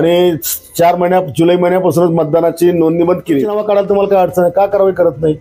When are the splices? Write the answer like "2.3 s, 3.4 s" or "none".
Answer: 3.5 s